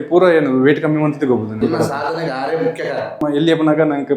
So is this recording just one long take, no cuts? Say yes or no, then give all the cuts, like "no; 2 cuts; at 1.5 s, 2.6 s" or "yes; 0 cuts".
no; 2 cuts; at 1.6 s, 3.2 s